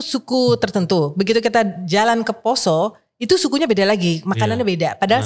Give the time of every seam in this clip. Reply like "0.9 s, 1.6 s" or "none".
none